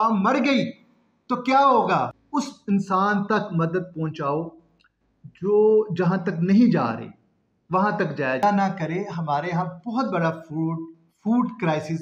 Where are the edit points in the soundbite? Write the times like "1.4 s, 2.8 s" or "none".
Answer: 2.2 s, 8.4 s